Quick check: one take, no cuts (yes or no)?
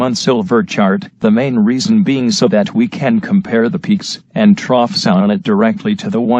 no